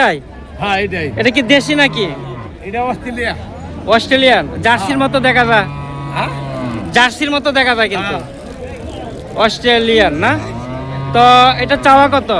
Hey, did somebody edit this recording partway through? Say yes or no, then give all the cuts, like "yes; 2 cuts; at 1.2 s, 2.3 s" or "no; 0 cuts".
no; 0 cuts